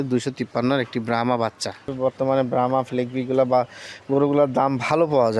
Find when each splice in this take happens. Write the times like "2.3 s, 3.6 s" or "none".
1.9 s